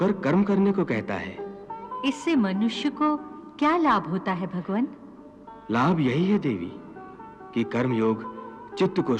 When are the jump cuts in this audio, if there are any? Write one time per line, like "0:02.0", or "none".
none